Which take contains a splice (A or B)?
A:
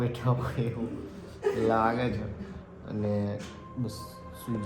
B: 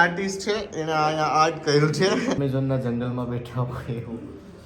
B